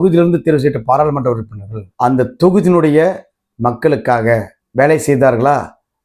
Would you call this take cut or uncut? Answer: uncut